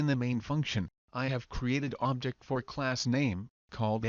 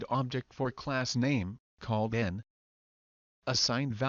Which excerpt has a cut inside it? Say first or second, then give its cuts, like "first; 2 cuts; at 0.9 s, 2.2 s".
first; 1 cut; at 1.0 s